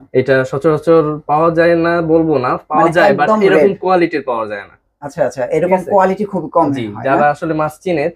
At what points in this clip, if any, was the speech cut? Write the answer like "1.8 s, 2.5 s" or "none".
none

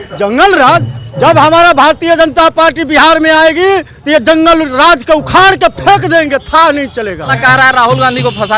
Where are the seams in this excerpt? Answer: 7.4 s

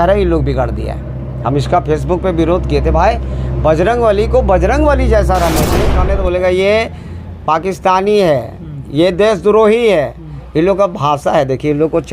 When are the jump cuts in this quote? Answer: 6.0 s

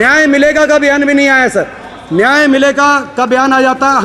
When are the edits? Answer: none

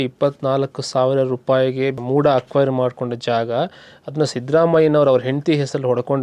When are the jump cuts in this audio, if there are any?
2.0 s

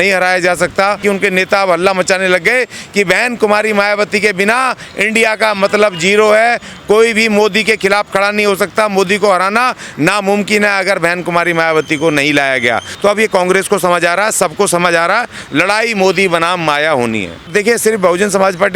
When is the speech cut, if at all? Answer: 1.0 s, 12.9 s, 17.5 s

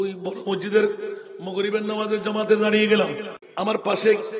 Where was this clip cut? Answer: 3.4 s

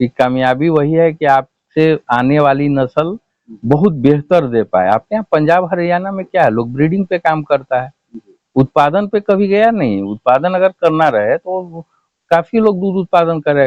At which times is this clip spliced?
none

